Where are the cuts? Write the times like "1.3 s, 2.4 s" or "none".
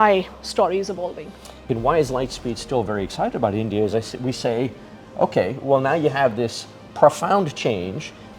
1.7 s